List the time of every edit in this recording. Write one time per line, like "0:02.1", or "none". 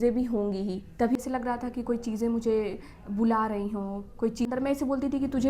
0:01.2
0:04.5

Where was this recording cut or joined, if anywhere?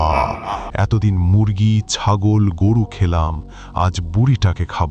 none

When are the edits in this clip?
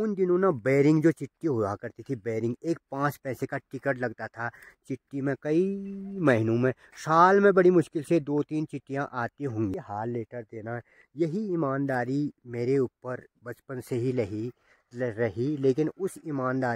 0:09.7

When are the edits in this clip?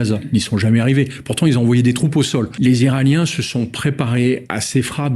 0:02.5

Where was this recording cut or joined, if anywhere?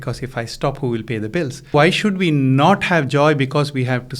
0:01.7

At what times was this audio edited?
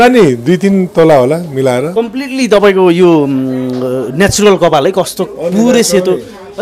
0:01.9

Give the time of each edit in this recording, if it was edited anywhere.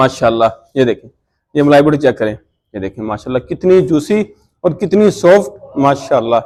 none

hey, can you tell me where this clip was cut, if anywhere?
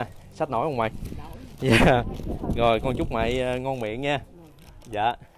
none

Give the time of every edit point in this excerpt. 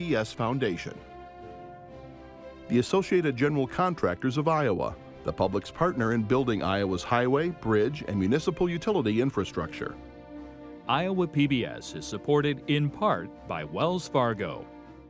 0:01.0
0:02.7

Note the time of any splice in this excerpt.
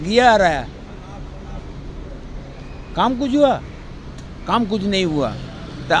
none

